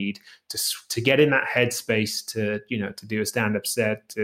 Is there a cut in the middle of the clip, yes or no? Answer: no